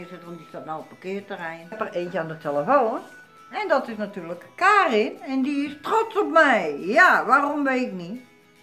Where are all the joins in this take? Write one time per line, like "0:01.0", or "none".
0:01.8